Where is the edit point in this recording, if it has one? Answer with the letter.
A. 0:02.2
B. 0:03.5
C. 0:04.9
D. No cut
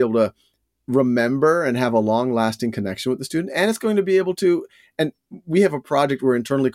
D